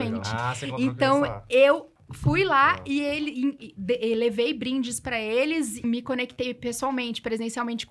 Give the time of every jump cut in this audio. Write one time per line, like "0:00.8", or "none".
0:05.8